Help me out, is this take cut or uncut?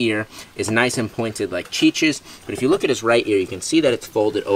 uncut